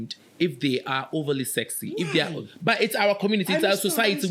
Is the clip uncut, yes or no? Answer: yes